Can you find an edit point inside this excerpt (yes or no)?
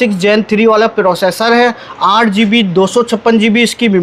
no